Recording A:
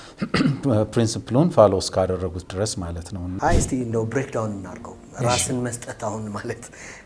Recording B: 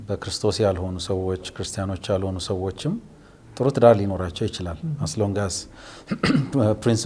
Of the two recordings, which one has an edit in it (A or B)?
A